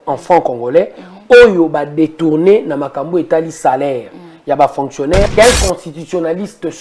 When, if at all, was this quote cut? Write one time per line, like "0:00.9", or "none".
0:05.3